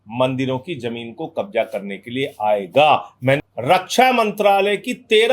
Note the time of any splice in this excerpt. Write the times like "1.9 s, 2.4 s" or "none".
3.4 s

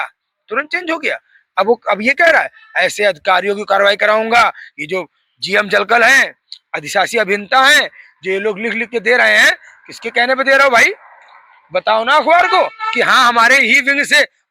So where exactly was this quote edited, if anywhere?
none

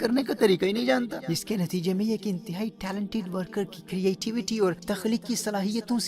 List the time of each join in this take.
1.3 s, 4.9 s

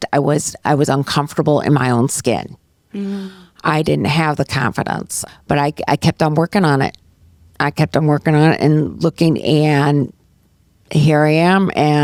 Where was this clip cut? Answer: none

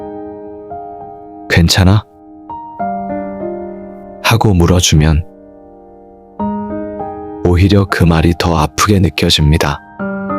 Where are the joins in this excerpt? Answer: 2.1 s, 3.8 s, 5.3 s, 7.4 s

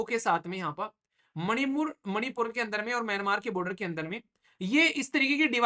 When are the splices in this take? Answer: none

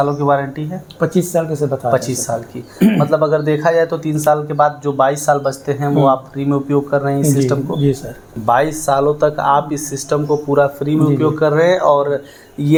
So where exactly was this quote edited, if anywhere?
none

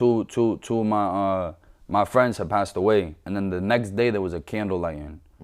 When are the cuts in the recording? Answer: 3.2 s

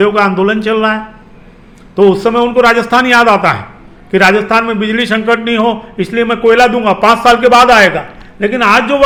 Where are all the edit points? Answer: none

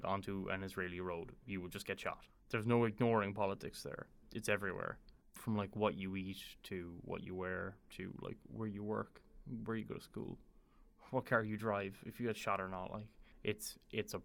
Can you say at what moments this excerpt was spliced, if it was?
2.3 s

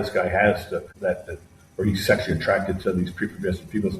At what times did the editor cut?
0.9 s

